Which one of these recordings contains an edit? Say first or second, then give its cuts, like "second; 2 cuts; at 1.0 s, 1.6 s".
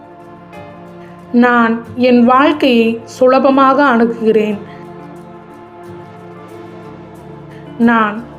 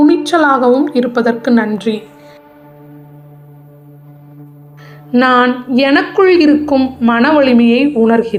first; 1 cut; at 1.3 s